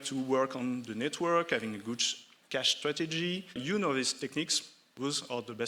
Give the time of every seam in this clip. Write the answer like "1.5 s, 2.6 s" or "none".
3.6 s

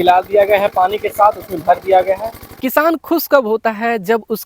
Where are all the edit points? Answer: 2.6 s

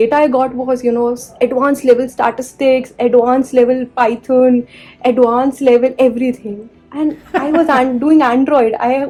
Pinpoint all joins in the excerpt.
none

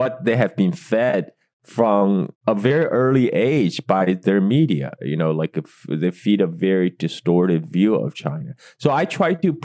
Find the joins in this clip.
none

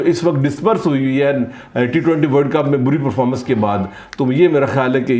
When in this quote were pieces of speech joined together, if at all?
none

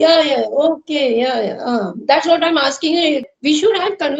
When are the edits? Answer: 3.2 s

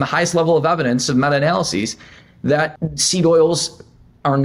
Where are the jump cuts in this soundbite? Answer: 2.9 s

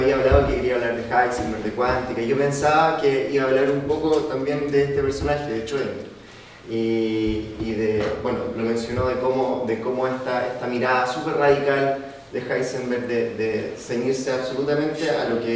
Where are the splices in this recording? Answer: 1.9 s

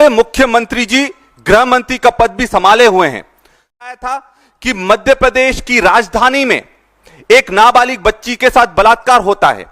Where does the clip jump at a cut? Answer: 4.0 s

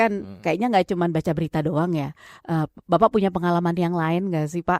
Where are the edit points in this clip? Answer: none

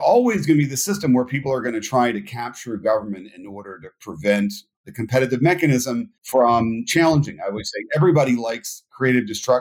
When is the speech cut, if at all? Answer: none

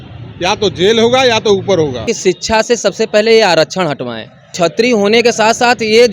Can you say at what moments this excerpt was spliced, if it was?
2.1 s, 4.5 s

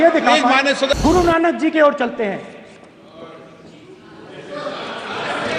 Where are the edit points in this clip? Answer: 0.9 s

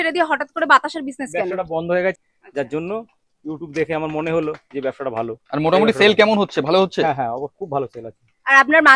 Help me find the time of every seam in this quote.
2.1 s

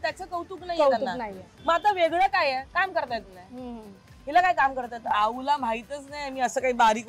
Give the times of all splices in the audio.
5.1 s

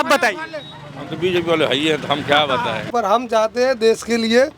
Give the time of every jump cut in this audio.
2.8 s

